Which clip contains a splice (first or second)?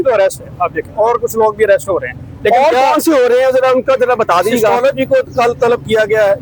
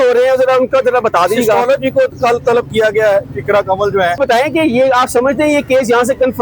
second